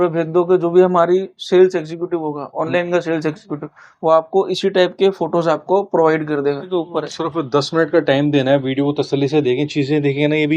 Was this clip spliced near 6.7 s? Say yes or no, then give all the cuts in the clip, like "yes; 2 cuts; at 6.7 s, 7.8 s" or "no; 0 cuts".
yes; 1 cut; at 6.7 s